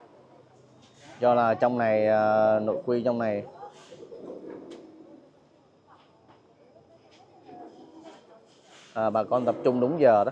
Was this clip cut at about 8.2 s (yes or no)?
no